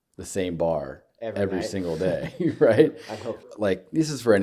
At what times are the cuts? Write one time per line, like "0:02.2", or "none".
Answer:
0:03.5